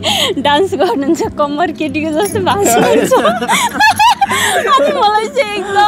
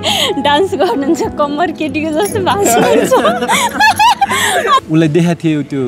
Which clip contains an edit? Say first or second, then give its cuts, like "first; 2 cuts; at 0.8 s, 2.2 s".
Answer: second; 1 cut; at 4.8 s